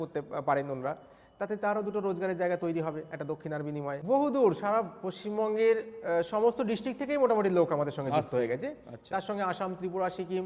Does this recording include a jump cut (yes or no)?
yes